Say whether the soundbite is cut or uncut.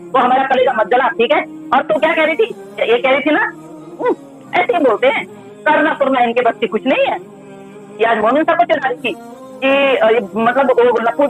uncut